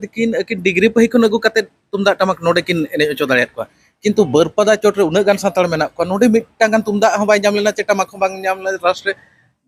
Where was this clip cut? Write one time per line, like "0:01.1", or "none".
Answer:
none